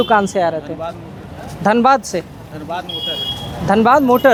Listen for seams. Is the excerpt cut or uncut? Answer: uncut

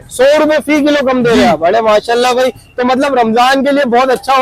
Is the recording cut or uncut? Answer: uncut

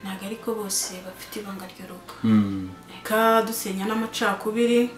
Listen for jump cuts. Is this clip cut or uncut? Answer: cut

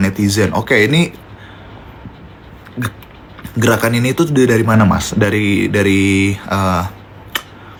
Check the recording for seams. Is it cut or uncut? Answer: uncut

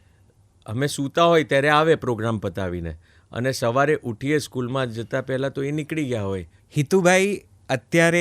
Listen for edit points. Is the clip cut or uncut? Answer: cut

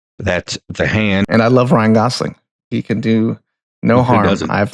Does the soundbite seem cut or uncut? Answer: cut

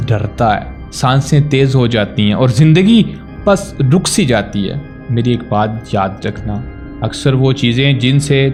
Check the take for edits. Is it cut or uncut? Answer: uncut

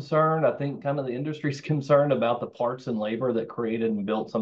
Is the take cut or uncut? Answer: uncut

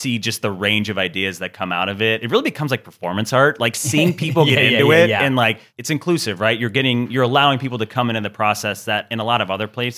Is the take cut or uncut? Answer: cut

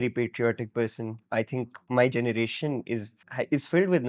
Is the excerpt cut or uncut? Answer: cut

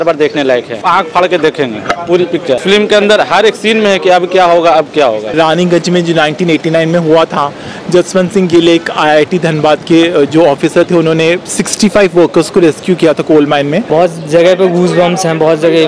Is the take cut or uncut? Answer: cut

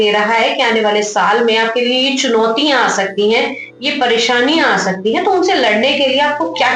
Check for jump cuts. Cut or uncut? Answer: uncut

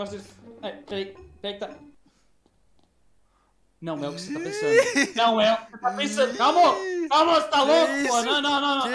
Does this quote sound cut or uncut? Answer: uncut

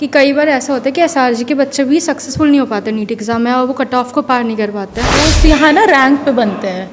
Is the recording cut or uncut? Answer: cut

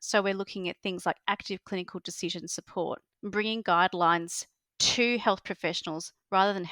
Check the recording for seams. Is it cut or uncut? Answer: uncut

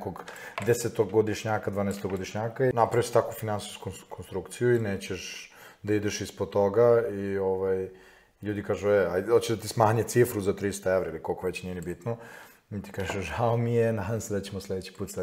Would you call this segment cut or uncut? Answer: cut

